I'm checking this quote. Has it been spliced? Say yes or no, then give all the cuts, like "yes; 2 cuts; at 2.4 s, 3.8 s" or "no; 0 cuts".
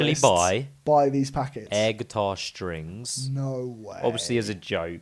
no; 0 cuts